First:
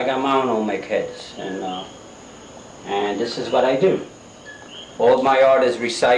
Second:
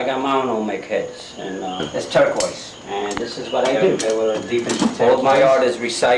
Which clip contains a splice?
second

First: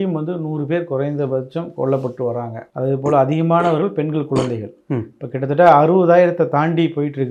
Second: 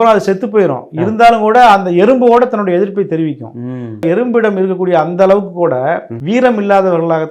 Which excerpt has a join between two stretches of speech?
second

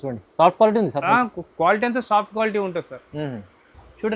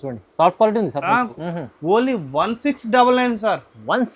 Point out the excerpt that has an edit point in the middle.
second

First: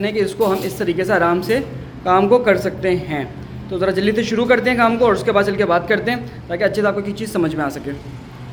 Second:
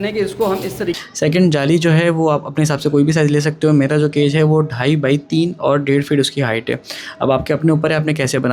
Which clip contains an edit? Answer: second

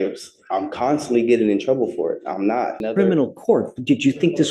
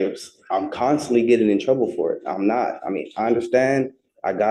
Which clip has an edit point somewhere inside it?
first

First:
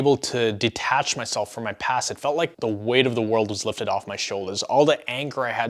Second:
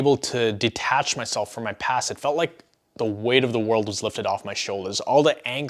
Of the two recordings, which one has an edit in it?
first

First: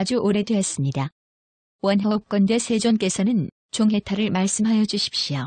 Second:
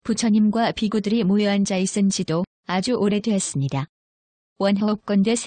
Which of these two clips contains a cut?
second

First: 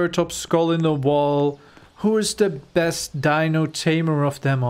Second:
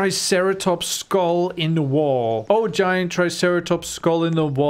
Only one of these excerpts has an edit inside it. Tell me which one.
second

